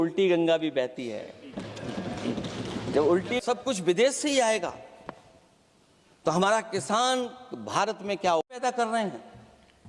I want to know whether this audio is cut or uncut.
cut